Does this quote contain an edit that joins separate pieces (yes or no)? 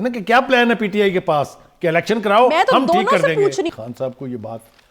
yes